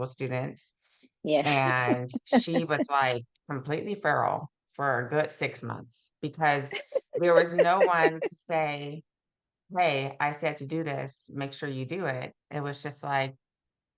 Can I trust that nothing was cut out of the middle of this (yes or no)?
no